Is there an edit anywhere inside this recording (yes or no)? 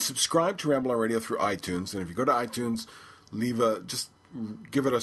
no